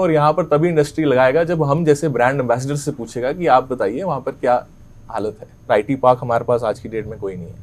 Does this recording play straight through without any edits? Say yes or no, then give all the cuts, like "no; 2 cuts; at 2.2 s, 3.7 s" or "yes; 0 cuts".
no; 1 cut; at 5.7 s